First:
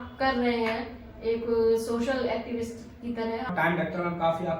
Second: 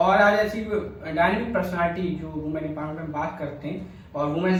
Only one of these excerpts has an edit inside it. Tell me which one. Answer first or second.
first